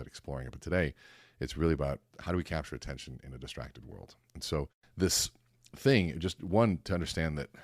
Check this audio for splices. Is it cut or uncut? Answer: cut